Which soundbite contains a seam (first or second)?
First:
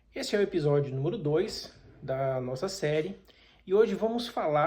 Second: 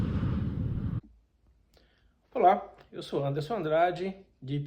second